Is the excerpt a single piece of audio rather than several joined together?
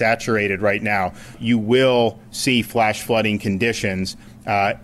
no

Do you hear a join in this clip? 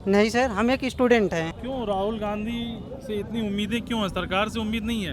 yes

